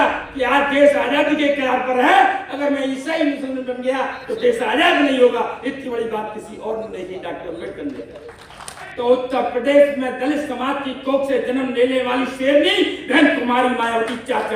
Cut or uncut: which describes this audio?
cut